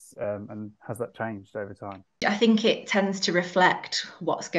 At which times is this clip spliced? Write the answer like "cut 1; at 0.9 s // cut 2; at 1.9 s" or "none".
cut 1; at 2.2 s